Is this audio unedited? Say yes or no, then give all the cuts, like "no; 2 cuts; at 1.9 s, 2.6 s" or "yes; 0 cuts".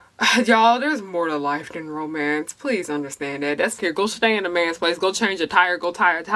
no; 1 cut; at 3.8 s